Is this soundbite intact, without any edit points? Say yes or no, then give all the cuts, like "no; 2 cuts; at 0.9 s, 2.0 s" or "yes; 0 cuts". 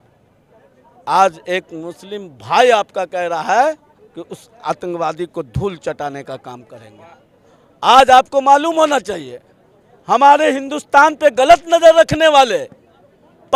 yes; 0 cuts